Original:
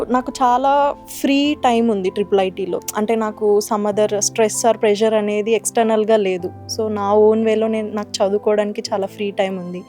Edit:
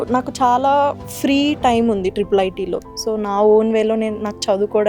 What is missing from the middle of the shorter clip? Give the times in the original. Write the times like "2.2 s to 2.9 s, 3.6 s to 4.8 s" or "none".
2.9 s to 6.6 s